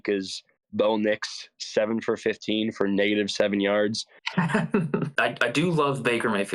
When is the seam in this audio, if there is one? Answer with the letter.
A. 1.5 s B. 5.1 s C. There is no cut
B